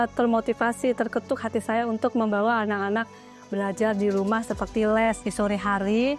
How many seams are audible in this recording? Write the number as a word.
one